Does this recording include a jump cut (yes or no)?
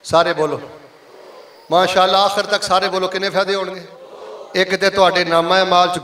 no